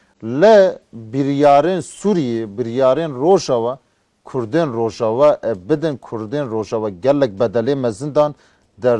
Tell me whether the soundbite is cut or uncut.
uncut